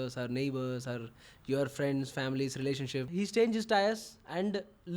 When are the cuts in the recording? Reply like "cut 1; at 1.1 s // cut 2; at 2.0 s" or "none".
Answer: cut 1; at 3.1 s